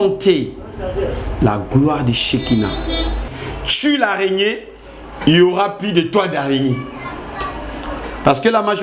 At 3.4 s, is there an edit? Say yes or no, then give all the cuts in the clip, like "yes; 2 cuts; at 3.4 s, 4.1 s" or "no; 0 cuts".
yes; 1 cut; at 3.4 s